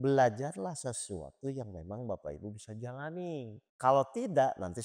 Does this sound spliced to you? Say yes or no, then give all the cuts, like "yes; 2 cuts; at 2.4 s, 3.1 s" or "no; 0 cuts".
yes; 1 cut; at 3.6 s